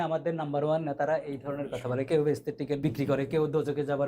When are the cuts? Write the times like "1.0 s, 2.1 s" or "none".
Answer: 2.8 s